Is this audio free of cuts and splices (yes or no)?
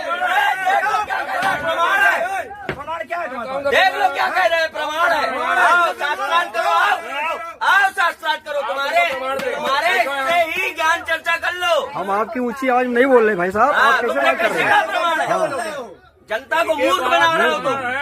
yes